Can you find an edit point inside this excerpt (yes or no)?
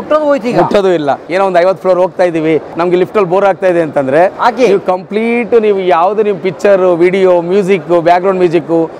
yes